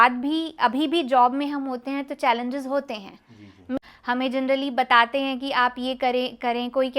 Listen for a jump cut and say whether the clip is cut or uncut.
cut